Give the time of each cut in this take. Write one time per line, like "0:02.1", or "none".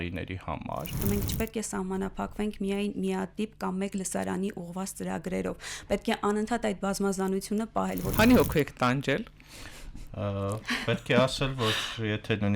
0:01.0
0:08.0